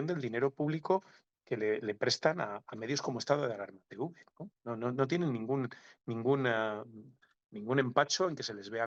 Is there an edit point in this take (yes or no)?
no